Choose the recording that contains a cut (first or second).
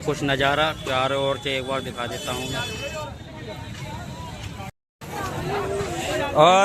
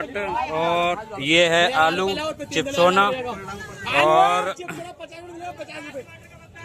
first